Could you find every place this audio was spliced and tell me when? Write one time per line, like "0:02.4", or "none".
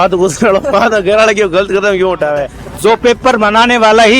0:02.6